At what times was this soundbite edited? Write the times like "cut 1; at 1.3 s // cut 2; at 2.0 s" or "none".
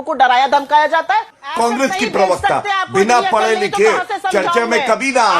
cut 1; at 1.4 s